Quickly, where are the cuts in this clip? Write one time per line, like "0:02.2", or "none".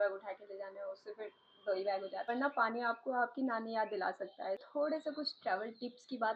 0:02.3
0:04.6